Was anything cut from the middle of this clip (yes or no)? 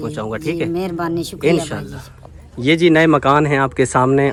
no